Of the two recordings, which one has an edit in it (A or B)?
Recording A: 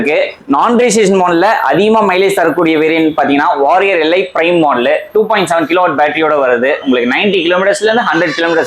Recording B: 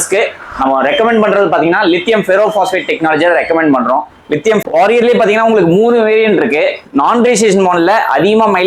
B